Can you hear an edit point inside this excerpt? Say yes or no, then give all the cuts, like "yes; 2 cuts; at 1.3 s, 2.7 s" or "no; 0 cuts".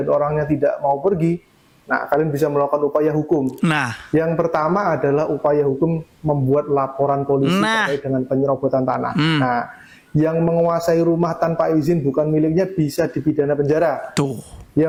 no; 0 cuts